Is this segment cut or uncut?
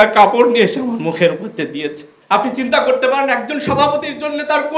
cut